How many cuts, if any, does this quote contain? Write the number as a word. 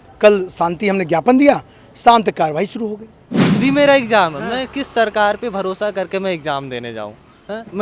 one